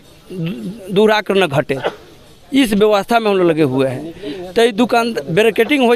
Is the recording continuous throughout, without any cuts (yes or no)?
yes